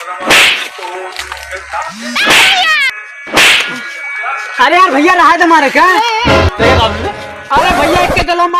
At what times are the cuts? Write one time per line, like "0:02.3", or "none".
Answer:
0:01.9